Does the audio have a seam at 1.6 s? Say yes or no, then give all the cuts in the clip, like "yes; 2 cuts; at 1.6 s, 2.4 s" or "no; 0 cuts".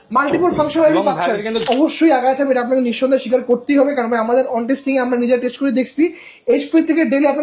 yes; 1 cut; at 1.6 s